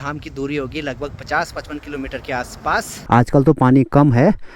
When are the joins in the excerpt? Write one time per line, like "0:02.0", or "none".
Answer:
0:03.0